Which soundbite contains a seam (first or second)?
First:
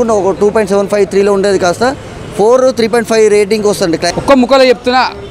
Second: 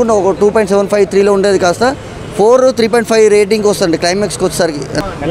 first